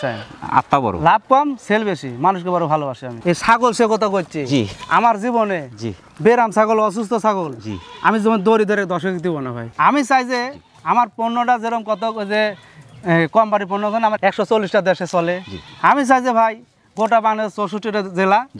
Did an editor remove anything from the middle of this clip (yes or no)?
yes